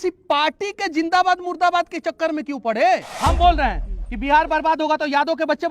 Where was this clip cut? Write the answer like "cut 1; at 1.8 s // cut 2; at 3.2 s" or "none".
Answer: cut 1; at 3.1 s

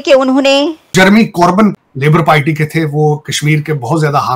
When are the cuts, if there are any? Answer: cut 1; at 0.9 s // cut 2; at 1.7 s

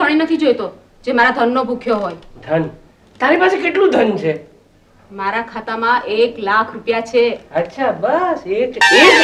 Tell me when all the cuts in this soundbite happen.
none

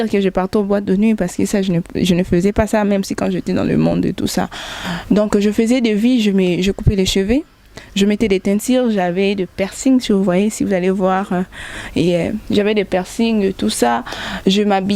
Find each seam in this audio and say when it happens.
none

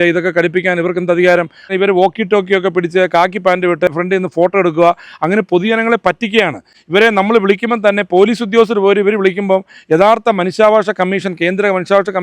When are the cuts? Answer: cut 1; at 1.7 s // cut 2; at 3.9 s

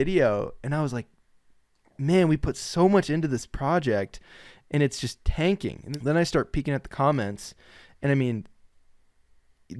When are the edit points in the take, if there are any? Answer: cut 1; at 5.8 s

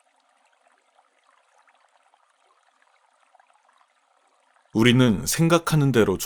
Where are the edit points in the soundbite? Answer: none

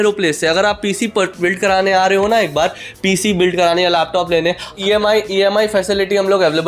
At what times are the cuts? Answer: cut 1; at 4.7 s

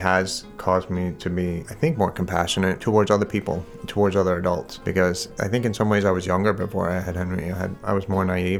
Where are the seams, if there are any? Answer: cut 1; at 1.6 s // cut 2; at 2.8 s // cut 3; at 4.7 s // cut 4; at 5.3 s // cut 5; at 7.7 s

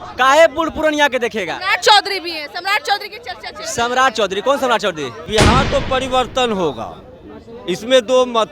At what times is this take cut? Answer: cut 1; at 5.2 s

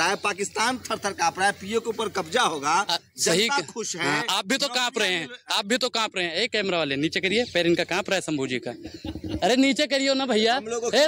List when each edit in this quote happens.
none

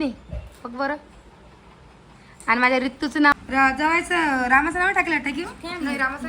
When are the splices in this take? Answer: cut 1; at 3.3 s

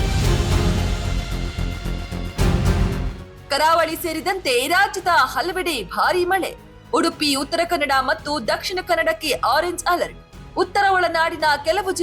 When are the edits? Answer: cut 1; at 3.1 s

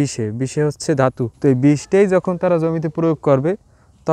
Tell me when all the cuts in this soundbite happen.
cut 1; at 1.3 s

